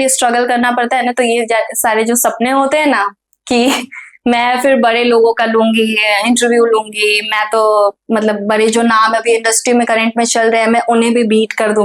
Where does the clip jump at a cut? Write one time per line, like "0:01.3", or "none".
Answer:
none